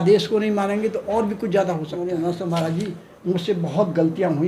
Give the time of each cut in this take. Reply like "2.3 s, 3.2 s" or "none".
1.9 s